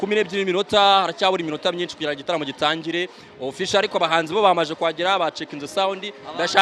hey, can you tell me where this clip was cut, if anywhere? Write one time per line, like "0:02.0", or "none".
none